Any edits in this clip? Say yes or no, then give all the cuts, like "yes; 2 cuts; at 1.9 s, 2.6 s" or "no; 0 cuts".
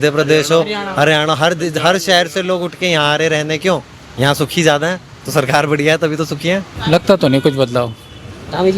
yes; 1 cut; at 6.7 s